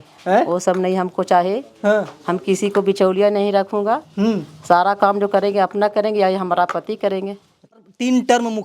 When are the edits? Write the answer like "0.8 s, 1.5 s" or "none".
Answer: 7.7 s